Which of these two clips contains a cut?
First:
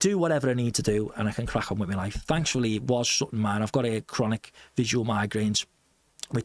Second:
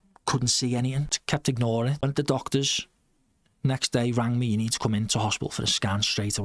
second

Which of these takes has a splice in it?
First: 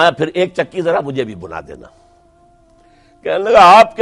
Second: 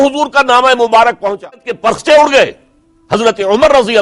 second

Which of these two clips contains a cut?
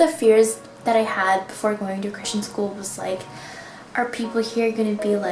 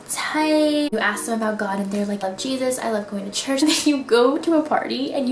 second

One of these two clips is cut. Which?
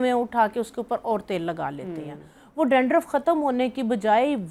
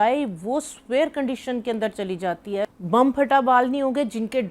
second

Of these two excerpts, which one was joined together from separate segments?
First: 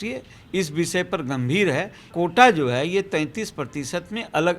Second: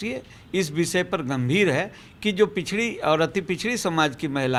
first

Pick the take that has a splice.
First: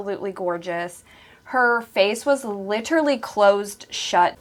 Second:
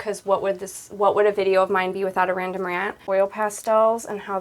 second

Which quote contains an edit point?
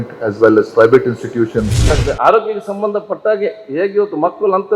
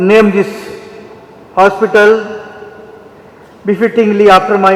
first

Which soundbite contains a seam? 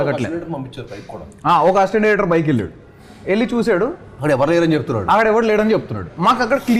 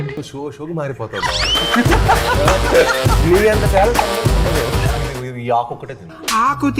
second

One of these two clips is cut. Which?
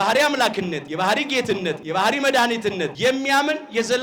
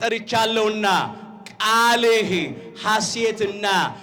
first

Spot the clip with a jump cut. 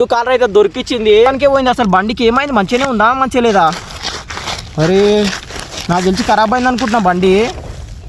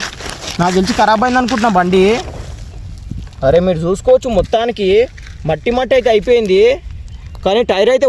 first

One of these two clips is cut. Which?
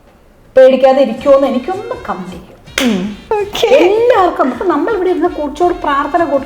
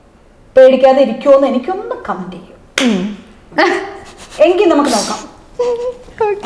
first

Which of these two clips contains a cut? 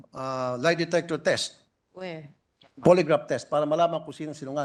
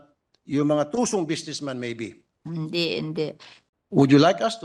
second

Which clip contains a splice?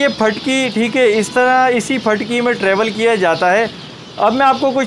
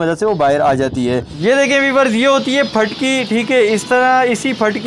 second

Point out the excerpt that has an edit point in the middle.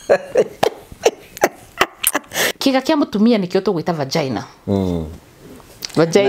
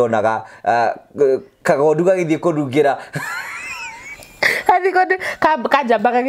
first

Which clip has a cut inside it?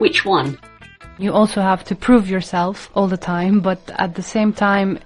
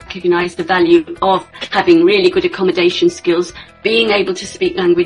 first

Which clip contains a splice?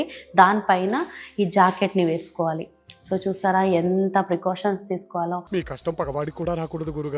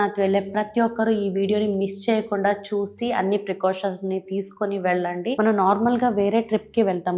second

